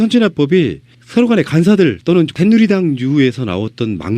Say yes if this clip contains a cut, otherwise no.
no